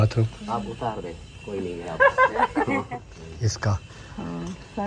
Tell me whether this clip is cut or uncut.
cut